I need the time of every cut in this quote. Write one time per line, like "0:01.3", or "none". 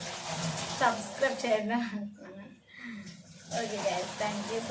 none